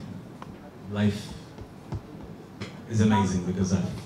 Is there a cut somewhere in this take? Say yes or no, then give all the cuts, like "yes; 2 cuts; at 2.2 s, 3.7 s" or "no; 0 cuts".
no; 0 cuts